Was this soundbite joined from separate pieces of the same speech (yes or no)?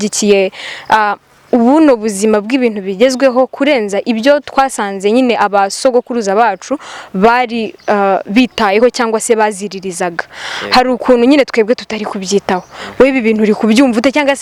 no